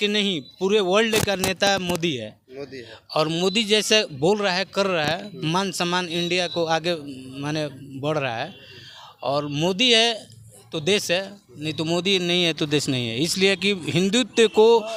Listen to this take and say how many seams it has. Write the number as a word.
zero